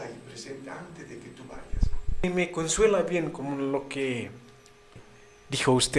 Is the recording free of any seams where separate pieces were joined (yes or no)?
no